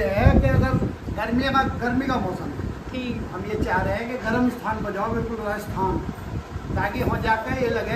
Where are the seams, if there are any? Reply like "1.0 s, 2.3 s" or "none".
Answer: none